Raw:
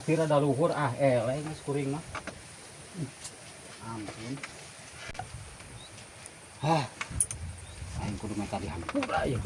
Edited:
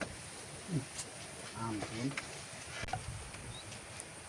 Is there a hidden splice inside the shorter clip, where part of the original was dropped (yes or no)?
no